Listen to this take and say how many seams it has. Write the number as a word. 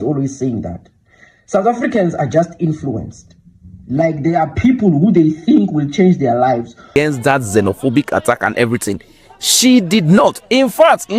one